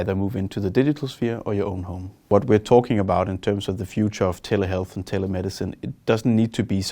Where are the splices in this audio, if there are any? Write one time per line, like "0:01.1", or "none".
0:02.2